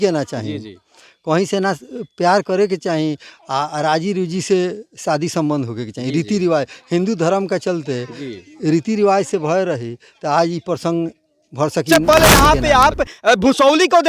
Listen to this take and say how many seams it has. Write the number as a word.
one